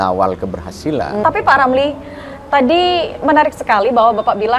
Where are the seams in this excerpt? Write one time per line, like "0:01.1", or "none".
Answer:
0:01.2